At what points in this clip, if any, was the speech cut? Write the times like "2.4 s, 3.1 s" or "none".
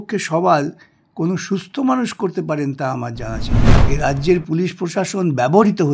3.6 s

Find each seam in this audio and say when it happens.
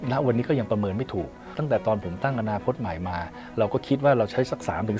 1.6 s

